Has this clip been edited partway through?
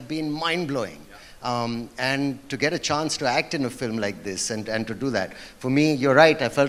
no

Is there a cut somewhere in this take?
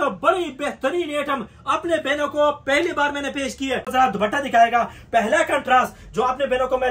yes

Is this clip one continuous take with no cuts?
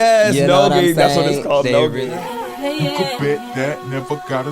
no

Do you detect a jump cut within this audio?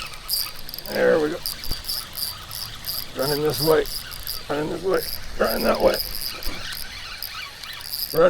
yes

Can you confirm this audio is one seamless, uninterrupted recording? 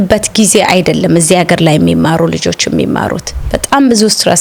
yes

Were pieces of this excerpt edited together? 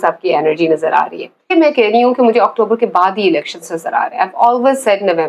yes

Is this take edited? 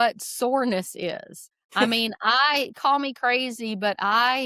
yes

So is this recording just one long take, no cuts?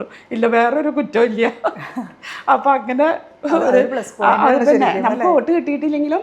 yes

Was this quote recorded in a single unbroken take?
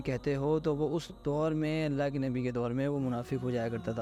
yes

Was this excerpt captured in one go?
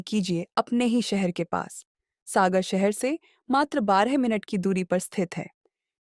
yes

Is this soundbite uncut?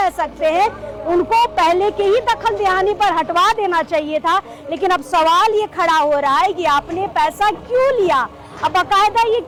yes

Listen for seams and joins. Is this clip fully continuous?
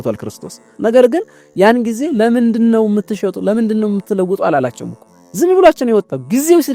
yes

